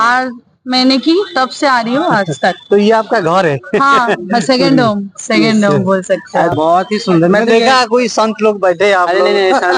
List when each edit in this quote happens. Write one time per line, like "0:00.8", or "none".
0:06.5